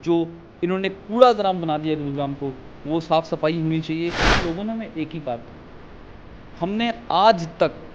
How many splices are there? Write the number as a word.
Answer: one